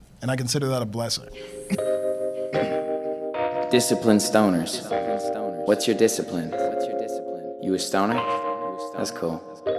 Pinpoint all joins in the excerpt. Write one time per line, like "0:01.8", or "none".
0:01.7